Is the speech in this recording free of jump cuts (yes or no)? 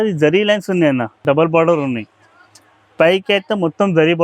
no